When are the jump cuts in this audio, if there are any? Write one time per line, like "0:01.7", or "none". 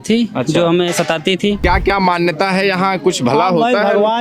0:01.6